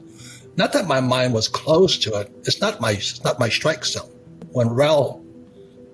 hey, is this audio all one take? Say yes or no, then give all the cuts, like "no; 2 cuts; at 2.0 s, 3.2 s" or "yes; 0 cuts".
no; 1 cut; at 4.4 s